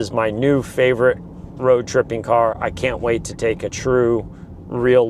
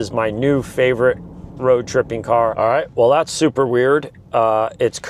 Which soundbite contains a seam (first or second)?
second